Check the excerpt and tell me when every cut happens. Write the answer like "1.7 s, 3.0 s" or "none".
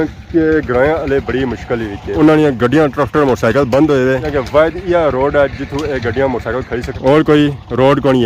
none